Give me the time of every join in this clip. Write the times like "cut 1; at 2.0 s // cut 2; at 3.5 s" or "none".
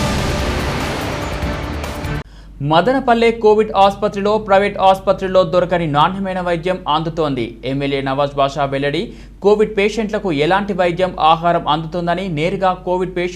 none